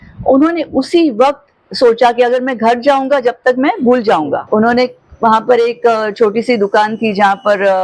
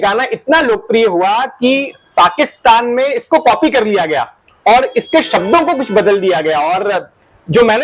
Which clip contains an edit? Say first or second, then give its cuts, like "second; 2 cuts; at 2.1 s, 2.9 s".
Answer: first; 1 cut; at 4.4 s